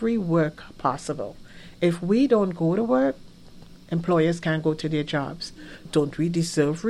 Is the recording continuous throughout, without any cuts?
no; 1 cut; at 5.8 s

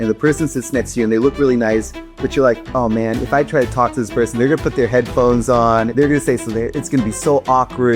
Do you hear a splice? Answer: yes; 1 cut; at 5.9 s

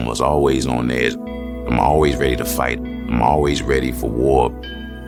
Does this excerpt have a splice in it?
no; 0 cuts

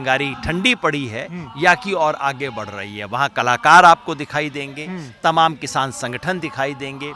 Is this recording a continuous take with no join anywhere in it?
yes; 0 cuts

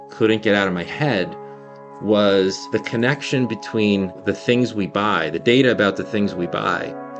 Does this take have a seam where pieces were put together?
yes; 2 cuts; at 2.6 s, 4.2 s

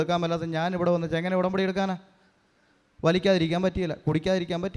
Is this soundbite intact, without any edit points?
yes; 0 cuts

